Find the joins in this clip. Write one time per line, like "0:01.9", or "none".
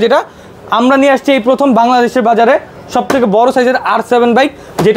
none